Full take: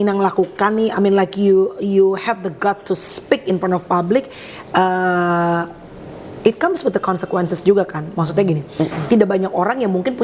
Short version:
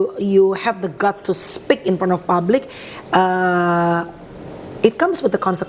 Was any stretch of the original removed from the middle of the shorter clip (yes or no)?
no